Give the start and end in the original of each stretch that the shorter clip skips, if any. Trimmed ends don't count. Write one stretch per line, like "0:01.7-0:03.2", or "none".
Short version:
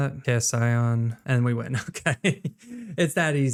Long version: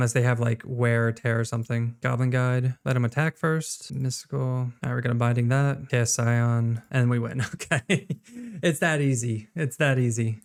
none